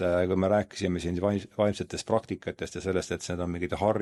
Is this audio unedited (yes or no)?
yes